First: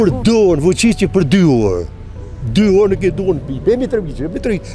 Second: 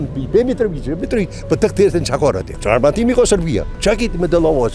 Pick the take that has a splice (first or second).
second